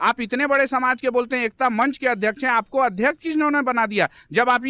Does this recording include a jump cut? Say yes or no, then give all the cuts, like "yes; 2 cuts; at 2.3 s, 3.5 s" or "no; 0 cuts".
no; 0 cuts